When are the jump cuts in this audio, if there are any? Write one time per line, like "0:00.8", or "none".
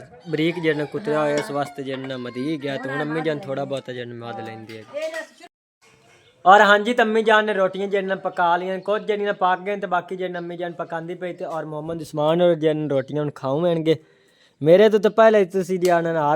0:05.5